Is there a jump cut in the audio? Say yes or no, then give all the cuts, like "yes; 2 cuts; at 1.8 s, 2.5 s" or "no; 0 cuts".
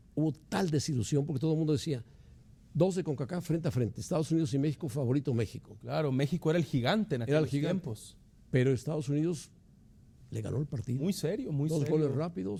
no; 0 cuts